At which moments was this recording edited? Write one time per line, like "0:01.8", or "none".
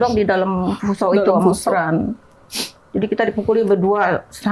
none